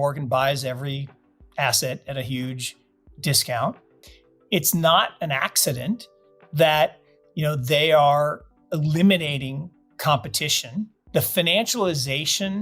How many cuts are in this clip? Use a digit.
2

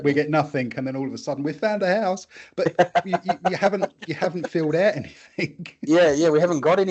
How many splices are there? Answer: 0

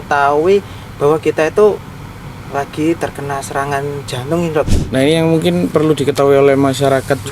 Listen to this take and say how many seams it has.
1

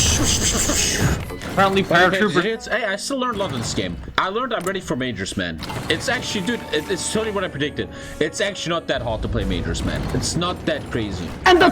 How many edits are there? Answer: 1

